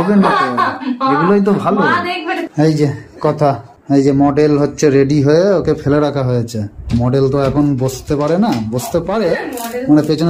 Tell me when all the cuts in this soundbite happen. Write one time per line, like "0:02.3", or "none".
0:02.5
0:03.7